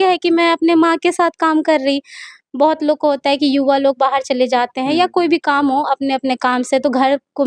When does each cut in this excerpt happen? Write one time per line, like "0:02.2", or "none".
none

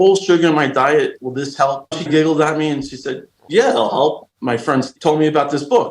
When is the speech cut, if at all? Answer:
0:01.9
0:04.8

